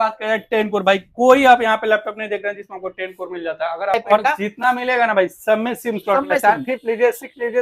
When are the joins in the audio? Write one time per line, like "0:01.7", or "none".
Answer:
0:04.0